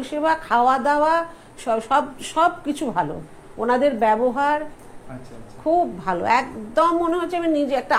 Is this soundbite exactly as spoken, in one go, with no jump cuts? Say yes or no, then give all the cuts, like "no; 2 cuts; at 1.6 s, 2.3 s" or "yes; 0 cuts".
yes; 0 cuts